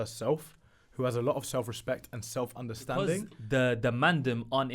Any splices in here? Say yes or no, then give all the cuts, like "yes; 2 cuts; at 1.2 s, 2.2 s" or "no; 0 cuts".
yes; 1 cut; at 3.3 s